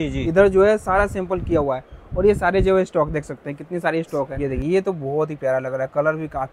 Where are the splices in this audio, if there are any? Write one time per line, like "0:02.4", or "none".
0:04.4